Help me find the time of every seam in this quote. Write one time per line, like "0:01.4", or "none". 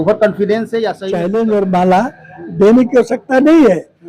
0:01.0